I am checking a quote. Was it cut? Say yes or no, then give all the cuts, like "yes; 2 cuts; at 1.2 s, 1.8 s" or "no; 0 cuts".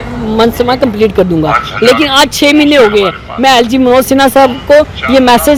no; 0 cuts